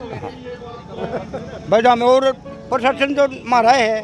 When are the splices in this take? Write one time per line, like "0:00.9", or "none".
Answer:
none